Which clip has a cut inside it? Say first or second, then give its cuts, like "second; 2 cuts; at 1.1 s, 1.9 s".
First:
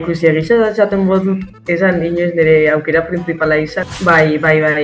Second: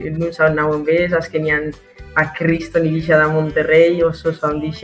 first; 1 cut; at 3.8 s